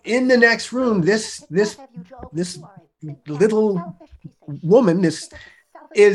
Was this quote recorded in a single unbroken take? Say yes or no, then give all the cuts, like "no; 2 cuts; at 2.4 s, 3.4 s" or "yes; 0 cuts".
yes; 0 cuts